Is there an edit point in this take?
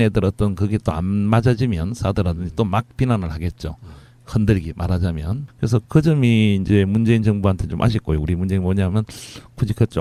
no; 0 cuts

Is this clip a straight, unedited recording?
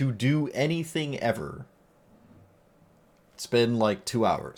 yes; 0 cuts

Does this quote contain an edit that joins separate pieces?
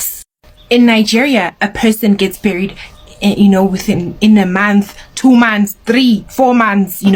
no; 0 cuts

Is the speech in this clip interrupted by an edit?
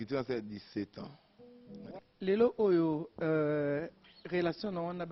yes; 1 cut; at 2.0 s

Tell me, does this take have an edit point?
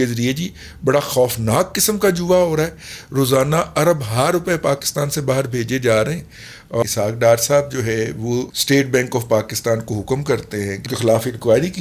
yes; 3 cuts; at 6.8 s, 8.5 s, 10.8 s

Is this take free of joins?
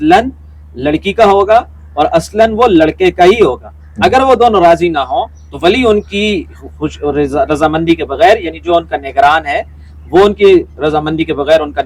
yes; 0 cuts

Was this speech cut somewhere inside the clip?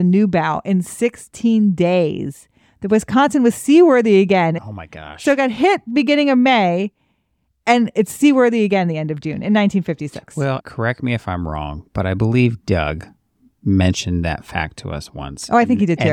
yes; 2 cuts; at 4.5 s, 10.7 s

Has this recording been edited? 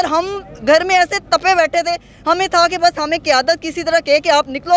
no; 0 cuts

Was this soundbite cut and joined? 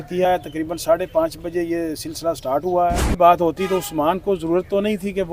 yes; 1 cut; at 3.1 s

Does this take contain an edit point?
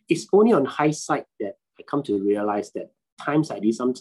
no; 0 cuts

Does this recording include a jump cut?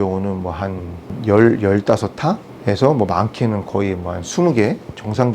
yes; 1 cut; at 1.1 s

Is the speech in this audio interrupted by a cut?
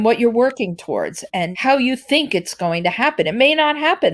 yes; 1 cut; at 1.2 s

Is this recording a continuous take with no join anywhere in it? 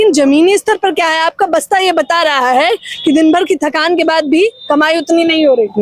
yes; 0 cuts

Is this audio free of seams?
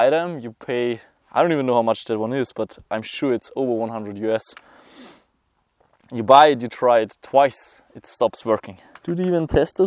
no; 1 cut; at 8.9 s

